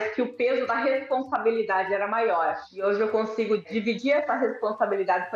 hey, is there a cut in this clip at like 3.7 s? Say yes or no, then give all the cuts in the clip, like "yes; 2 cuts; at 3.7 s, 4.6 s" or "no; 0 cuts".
yes; 2 cuts; at 2.7 s, 3.7 s